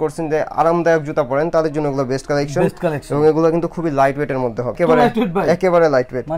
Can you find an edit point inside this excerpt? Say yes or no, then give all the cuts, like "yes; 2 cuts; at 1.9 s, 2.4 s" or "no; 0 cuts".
no; 0 cuts